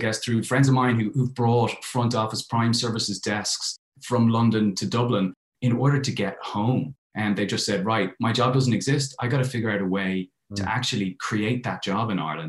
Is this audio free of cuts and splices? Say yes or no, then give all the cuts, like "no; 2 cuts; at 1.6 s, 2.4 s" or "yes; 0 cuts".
yes; 0 cuts